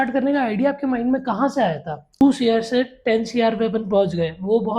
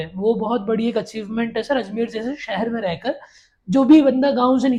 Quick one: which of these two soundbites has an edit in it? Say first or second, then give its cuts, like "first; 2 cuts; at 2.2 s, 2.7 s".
first; 1 cut; at 2.2 s